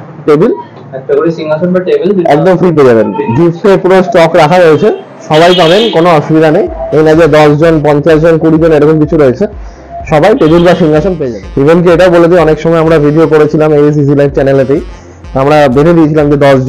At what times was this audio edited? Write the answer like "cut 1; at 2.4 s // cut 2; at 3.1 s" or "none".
cut 1; at 11.3 s